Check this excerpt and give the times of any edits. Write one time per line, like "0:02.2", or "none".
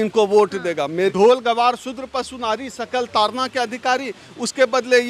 0:01.1